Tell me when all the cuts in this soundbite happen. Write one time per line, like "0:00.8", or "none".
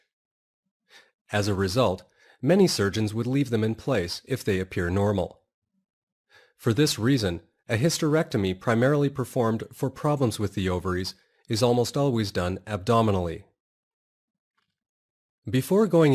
0:08.4